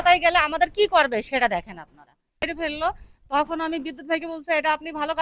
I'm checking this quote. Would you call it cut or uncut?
cut